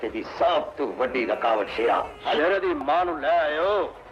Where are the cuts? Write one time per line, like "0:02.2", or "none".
0:02.4